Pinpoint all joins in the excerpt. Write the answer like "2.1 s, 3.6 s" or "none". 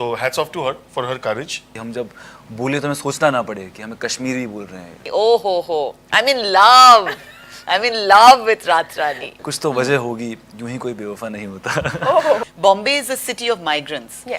1.7 s, 5.0 s, 9.2 s, 12.5 s